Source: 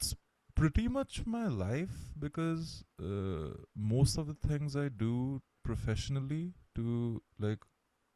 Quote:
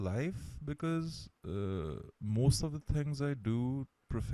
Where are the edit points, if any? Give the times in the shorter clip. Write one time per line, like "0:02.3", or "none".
none